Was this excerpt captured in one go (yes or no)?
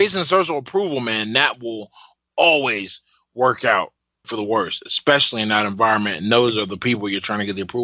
yes